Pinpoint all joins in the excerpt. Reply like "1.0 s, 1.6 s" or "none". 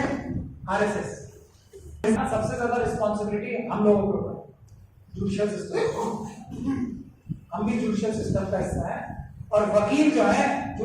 2.1 s